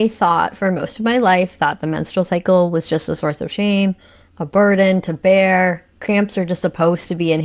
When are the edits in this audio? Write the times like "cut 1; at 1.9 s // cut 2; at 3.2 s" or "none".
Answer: none